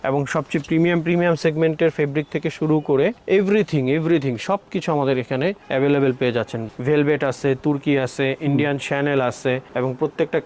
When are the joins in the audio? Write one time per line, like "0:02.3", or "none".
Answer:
none